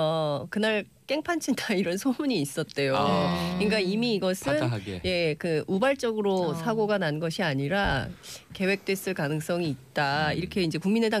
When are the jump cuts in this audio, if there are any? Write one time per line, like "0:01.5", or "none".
0:04.9

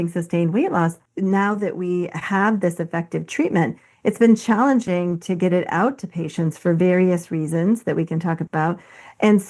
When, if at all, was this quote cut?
0:01.0

